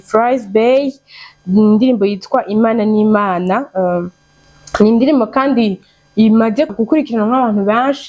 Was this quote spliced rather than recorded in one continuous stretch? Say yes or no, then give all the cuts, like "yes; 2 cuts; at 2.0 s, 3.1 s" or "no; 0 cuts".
no; 0 cuts